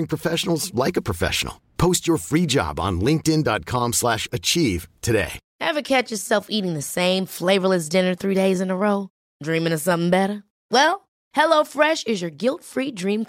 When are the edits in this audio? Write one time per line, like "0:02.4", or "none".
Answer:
0:05.4